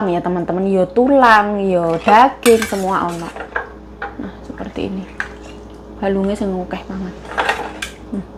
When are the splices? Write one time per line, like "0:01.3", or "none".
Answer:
none